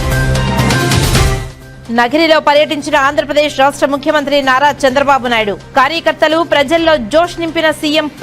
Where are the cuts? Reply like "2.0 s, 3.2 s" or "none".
1.5 s